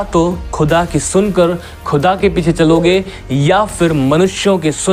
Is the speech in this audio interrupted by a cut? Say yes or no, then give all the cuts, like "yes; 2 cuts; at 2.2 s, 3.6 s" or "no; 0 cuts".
no; 0 cuts